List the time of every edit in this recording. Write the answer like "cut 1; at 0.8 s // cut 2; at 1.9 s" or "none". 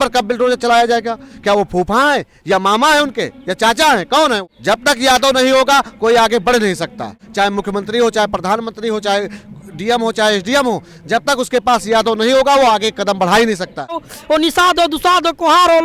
cut 1; at 4.5 s // cut 2; at 7.2 s // cut 3; at 14.0 s